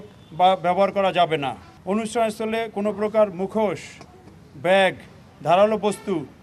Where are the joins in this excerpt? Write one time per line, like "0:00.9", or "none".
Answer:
0:01.6